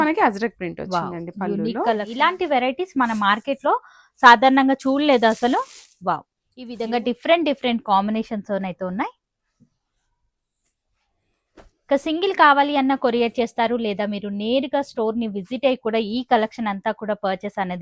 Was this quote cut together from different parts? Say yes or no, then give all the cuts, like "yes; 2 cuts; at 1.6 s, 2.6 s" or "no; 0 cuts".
yes; 2 cuts; at 2.1 s, 6.8 s